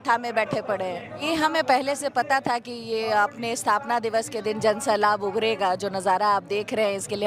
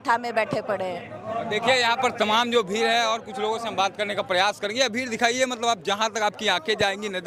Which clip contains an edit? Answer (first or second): first